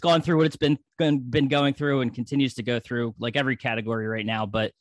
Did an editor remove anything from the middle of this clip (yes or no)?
no